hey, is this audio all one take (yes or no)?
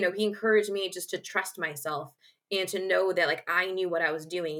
yes